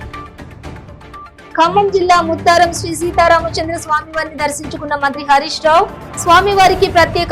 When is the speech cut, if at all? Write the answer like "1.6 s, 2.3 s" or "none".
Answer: 1.1 s